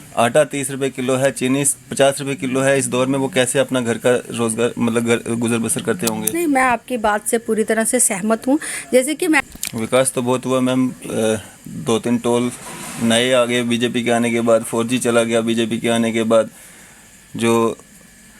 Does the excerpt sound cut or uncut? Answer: cut